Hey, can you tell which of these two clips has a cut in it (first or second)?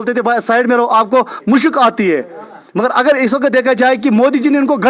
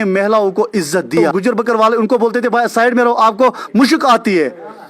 second